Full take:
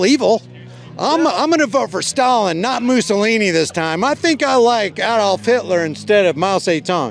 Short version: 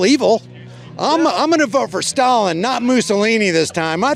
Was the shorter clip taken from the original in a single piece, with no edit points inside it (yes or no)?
yes